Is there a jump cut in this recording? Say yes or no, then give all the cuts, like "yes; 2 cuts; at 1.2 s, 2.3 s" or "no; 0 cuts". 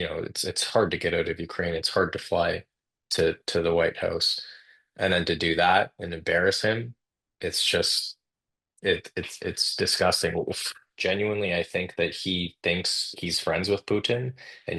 yes; 1 cut; at 10.9 s